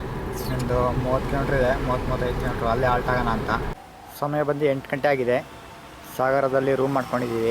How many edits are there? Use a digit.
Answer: 1